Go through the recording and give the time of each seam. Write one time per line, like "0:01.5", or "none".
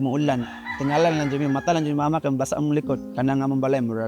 0:03.0